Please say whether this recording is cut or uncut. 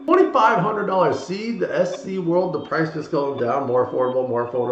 uncut